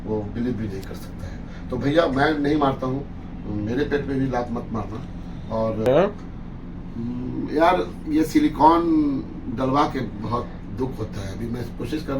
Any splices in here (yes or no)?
yes